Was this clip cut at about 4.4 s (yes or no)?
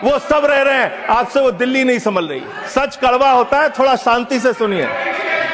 no